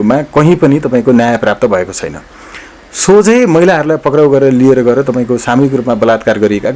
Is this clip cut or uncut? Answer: uncut